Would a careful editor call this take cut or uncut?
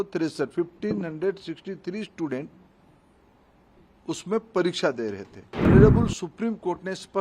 cut